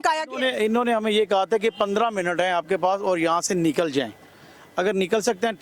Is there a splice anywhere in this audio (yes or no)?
no